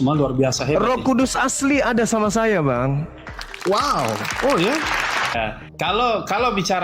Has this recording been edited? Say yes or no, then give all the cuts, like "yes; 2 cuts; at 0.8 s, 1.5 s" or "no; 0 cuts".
yes; 1 cut; at 5.3 s